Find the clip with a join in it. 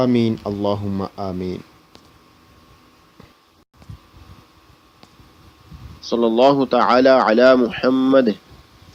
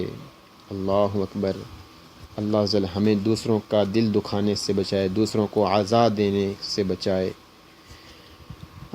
second; 1 cut; at 5.5 s

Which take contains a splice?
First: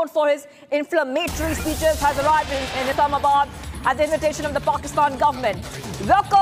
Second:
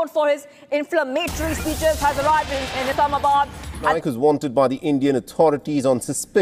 second; 1 cut; at 3.9 s

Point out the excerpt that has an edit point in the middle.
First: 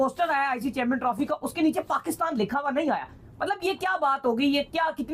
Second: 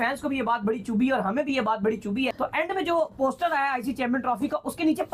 second; 1 cut; at 2.3 s

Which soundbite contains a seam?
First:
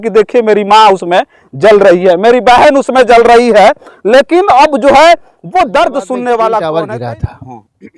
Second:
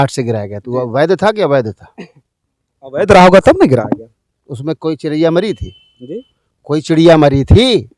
first; 1 cut; at 6.6 s

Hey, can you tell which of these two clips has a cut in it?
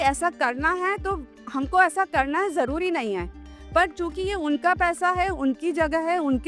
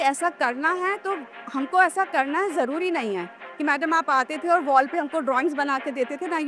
second; 1 cut; at 3.5 s

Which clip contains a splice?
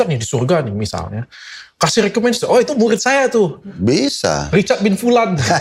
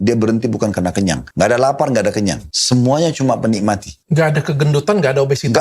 second; 3 cuts; at 1.2 s, 2.5 s, 3.9 s

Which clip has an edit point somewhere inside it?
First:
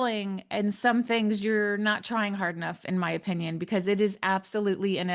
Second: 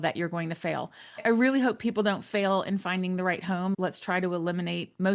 second; 2 cuts; at 1.2 s, 3.8 s

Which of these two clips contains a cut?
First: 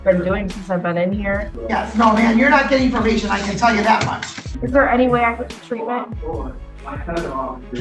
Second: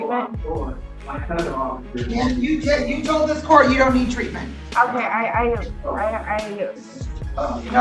first; 2 cuts; at 1.4 s, 4.5 s

